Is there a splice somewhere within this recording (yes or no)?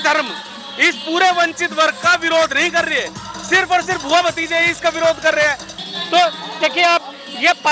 yes